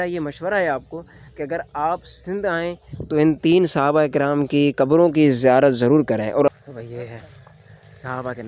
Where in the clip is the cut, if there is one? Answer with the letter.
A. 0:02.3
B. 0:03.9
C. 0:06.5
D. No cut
C